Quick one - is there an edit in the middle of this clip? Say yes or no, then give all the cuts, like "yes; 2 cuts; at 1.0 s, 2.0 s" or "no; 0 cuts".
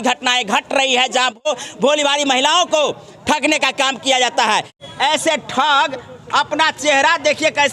yes; 2 cuts; at 1.4 s, 4.8 s